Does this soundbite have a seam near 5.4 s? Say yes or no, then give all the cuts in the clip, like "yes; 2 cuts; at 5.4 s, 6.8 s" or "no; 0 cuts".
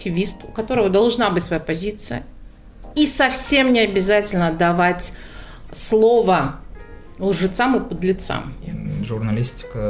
no; 1 cut; at 8.8 s